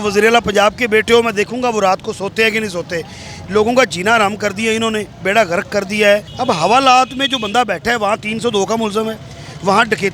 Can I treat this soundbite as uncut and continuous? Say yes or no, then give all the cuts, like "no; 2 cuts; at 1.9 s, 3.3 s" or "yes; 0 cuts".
no; 1 cut; at 6.3 s